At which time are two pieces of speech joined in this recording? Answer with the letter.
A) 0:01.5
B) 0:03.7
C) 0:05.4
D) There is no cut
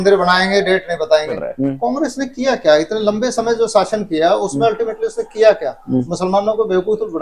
A